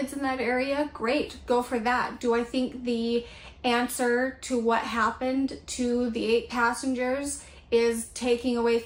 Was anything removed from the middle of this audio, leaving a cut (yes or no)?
no